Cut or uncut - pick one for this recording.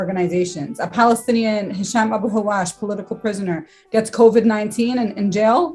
uncut